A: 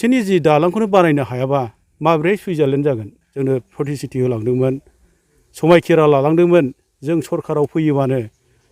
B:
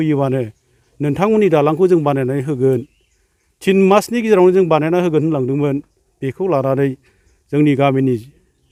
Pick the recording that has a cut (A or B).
A